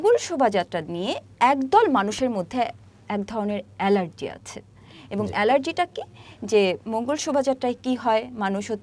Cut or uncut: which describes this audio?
uncut